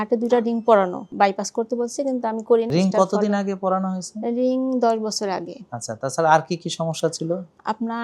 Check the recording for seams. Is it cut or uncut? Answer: cut